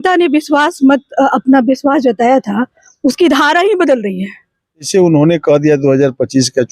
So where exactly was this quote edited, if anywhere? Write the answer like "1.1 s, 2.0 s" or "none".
4.9 s

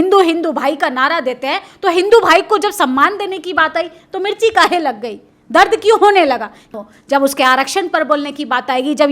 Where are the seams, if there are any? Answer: 6.6 s

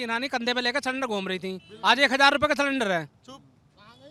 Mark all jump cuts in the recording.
none

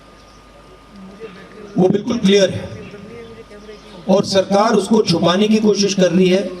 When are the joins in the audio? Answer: none

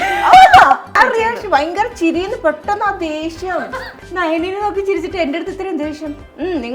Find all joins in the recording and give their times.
0.9 s, 4.0 s

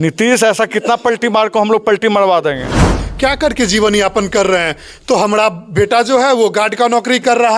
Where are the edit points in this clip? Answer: 3.0 s

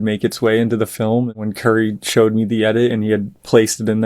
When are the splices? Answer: 1.3 s

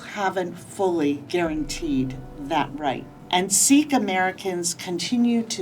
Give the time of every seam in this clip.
1.2 s, 3.1 s

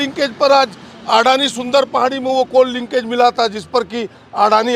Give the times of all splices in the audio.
none

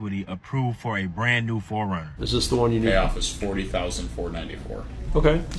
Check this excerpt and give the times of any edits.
2.2 s

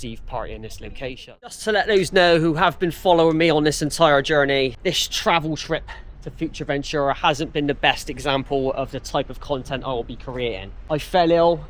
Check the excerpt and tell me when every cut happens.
1.6 s, 4.8 s, 10.7 s

